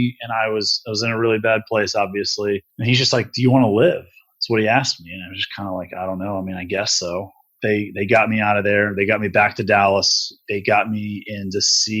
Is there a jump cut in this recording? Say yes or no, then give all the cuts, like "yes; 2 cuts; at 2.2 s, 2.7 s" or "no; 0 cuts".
yes; 3 cuts; at 2.7 s, 7.5 s, 10.4 s